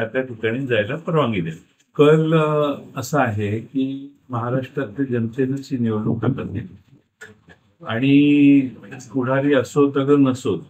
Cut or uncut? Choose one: uncut